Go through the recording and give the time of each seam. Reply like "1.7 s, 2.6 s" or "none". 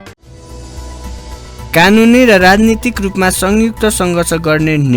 1.1 s